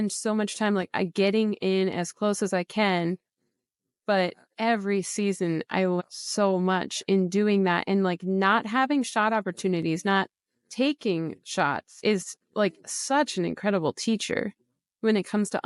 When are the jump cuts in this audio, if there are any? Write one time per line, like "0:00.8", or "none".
none